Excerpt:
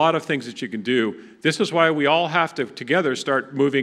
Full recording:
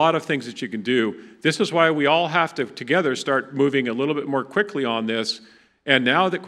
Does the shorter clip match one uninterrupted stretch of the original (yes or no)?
yes